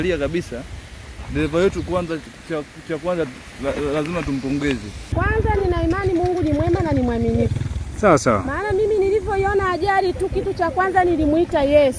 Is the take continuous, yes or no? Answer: no